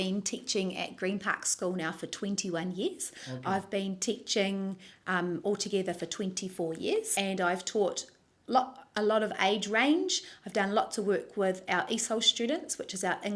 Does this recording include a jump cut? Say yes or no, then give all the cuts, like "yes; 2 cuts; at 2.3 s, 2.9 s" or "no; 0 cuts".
no; 0 cuts